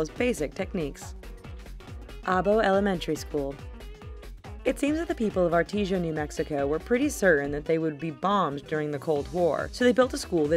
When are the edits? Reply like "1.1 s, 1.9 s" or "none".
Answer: 7.2 s